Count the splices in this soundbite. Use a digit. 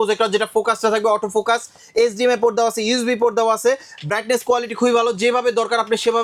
0